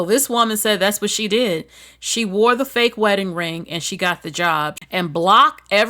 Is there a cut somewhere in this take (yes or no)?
yes